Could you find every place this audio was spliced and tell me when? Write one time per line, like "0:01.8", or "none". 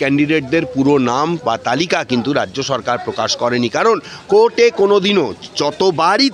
none